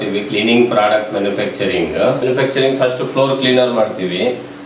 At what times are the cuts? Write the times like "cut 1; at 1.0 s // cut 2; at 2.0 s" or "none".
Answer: cut 1; at 2.2 s